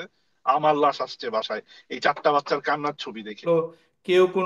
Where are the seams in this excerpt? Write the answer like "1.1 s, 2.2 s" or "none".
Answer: 3.4 s

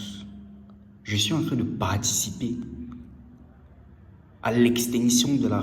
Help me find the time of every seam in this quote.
none

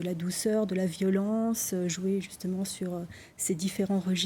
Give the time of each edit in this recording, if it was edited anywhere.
none

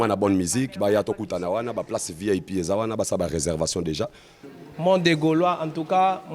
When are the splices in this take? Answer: 4.5 s

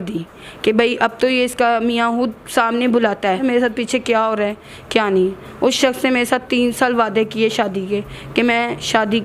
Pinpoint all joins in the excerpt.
3.4 s

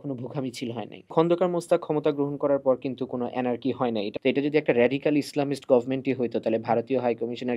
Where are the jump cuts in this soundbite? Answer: 1.1 s, 4.1 s

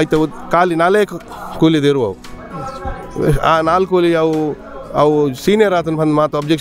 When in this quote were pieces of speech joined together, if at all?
none

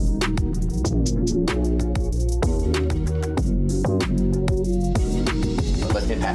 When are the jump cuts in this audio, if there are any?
none

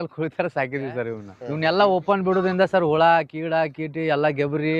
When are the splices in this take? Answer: 1.3 s

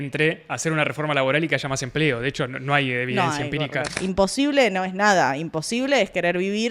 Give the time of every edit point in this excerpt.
4.0 s

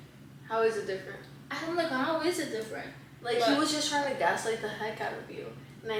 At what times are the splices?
none

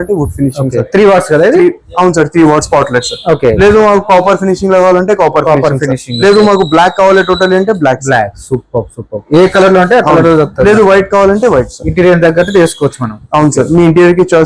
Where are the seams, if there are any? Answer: none

